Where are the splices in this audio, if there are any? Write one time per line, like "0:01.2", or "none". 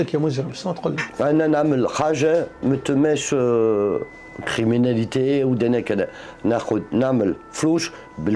0:01.1